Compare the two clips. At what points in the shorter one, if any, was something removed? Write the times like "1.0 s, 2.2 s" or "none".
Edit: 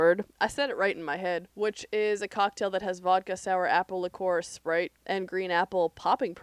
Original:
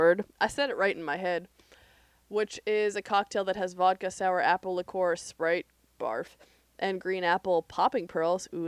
1.5 s, 5.0 s